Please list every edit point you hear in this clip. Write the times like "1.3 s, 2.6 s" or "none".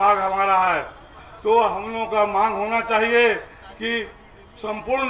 1.2 s